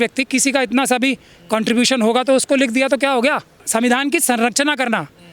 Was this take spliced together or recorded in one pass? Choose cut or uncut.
cut